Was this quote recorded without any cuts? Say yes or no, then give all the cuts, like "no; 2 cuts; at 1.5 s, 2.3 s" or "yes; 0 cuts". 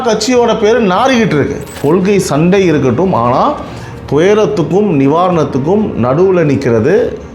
no; 1 cut; at 1.7 s